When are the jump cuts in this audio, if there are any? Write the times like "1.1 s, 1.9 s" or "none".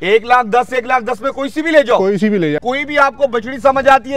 2.6 s